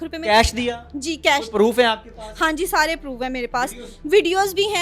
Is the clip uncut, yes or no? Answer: yes